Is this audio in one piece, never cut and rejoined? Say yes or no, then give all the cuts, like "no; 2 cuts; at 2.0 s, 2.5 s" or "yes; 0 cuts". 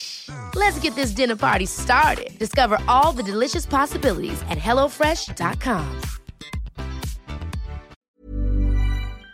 no; 1 cut; at 8.0 s